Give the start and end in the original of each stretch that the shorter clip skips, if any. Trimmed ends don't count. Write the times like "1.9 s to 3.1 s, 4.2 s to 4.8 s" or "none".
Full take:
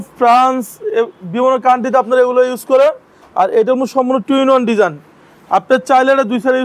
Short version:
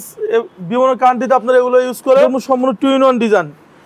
3.0 s to 3.8 s